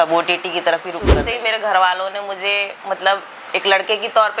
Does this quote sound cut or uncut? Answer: cut